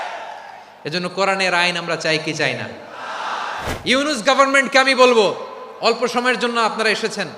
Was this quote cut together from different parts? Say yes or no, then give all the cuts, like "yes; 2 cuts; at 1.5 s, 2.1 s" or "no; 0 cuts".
yes; 1 cut; at 3.7 s